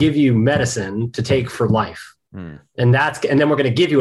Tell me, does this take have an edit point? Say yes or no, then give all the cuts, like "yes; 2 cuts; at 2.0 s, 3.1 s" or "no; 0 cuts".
no; 0 cuts